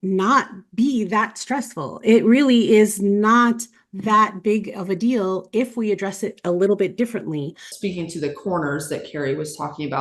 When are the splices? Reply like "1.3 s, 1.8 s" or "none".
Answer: 7.7 s